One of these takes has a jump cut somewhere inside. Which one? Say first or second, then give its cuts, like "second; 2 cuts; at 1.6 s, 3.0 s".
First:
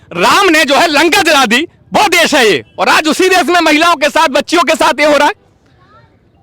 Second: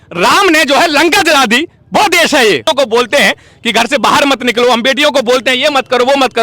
second; 1 cut; at 2.6 s